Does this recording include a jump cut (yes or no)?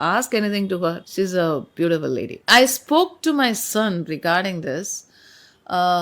yes